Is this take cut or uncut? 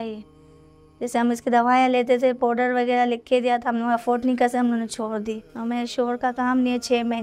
cut